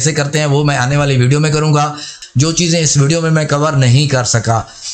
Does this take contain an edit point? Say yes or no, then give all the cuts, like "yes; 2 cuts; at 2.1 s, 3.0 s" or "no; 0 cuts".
yes; 1 cut; at 2.1 s